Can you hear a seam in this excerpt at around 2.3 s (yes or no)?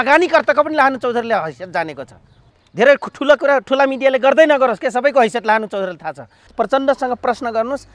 yes